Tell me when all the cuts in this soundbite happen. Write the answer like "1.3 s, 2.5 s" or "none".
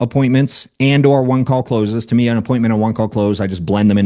none

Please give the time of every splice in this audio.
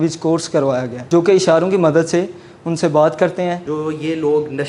0.9 s, 3.7 s

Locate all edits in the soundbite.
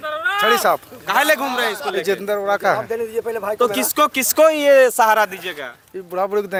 none

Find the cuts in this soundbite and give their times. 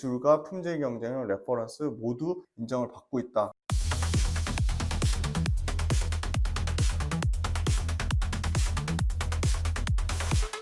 3.6 s

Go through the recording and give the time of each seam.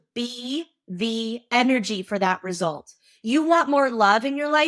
none

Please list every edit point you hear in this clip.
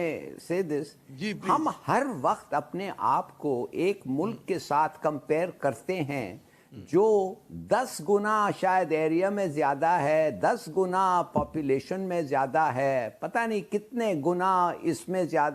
none

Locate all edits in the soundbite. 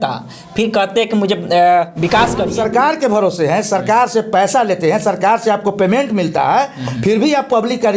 2.5 s

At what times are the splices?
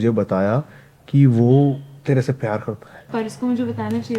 1.9 s, 3.0 s

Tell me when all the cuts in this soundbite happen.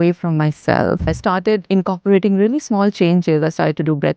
1.3 s

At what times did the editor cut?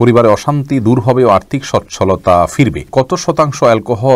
2.8 s

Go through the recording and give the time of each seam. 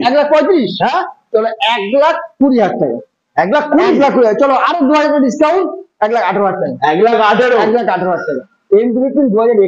none

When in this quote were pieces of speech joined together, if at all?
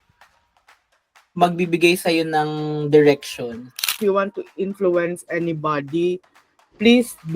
3.9 s

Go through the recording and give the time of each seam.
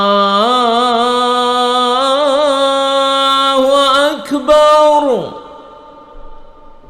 none

